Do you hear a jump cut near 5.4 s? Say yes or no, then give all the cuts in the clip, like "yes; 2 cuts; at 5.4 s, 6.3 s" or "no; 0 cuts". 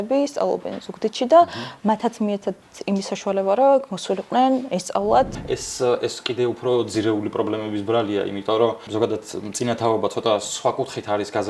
yes; 2 cuts; at 5.4 s, 8.9 s